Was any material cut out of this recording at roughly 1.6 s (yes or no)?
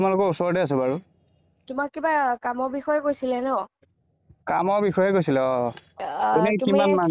no